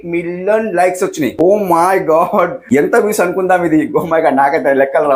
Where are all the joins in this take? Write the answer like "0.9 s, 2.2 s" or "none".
1.3 s